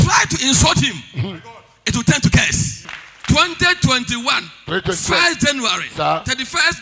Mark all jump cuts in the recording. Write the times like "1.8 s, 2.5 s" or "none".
2.9 s